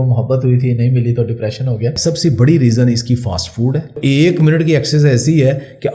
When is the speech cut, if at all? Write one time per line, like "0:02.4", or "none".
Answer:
0:02.0
0:04.0

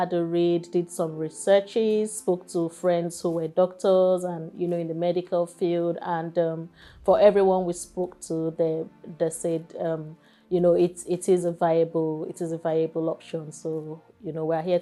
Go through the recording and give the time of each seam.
none

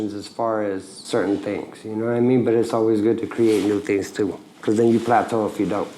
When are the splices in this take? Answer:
none

